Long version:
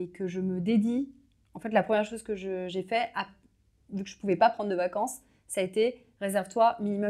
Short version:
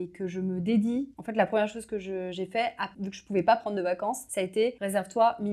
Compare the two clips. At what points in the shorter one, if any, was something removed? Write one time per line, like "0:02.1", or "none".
0:01.2
0:02.9
0:04.6